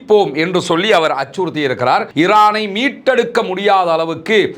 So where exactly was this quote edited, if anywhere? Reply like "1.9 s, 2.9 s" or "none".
2.1 s